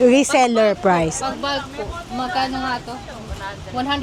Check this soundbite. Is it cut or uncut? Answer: uncut